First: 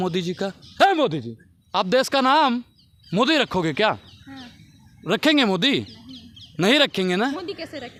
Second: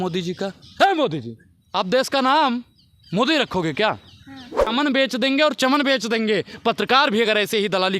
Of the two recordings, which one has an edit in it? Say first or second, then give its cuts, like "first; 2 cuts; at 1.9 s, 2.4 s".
second; 1 cut; at 4.7 s